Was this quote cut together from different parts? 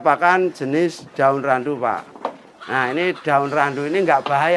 no; 0 cuts

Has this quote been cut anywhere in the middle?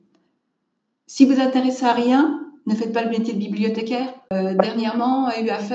yes; 1 cut; at 4.3 s

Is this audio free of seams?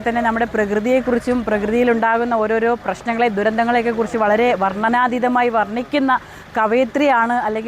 yes; 0 cuts

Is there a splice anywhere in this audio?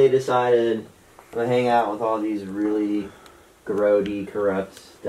no; 0 cuts

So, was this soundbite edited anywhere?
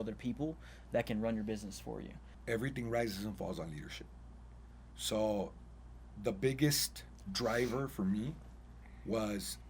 yes; 1 cut; at 2.3 s

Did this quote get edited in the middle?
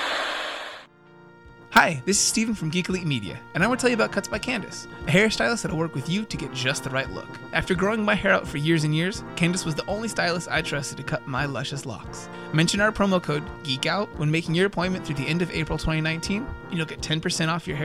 yes; 1 cut; at 1.0 s

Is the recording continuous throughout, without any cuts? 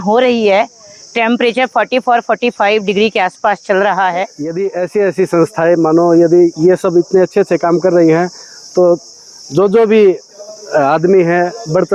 no; 1 cut; at 4.4 s

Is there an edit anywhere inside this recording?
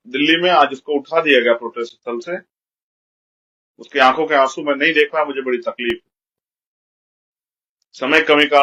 no; 0 cuts

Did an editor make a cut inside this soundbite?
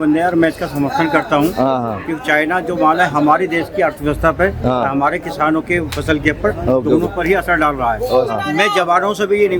yes; 1 cut; at 8.3 s

